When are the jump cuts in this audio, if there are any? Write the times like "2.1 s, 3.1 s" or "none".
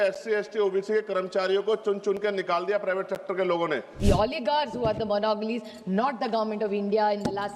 4.0 s

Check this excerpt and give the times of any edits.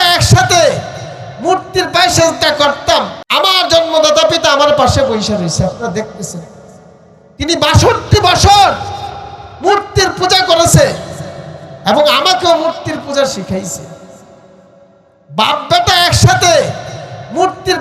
3.2 s

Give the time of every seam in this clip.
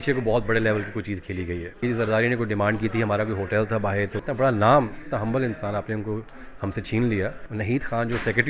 1.8 s, 4.2 s, 7.4 s

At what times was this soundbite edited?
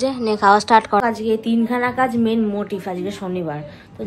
1.0 s

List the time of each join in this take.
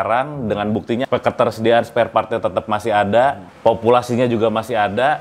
1.0 s, 3.5 s

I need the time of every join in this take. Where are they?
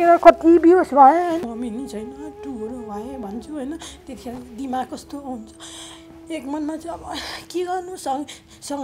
1.4 s

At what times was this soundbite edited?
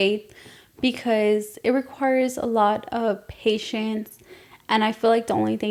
none

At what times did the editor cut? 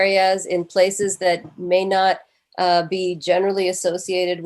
1.5 s

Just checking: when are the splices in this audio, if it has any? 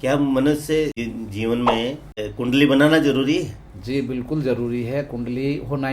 1.0 s, 2.2 s

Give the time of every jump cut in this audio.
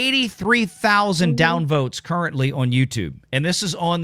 none

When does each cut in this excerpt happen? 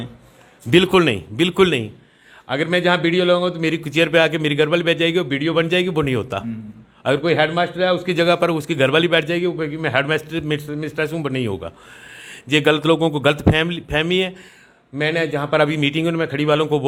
none

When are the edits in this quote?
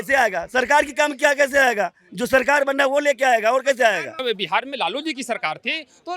4.2 s

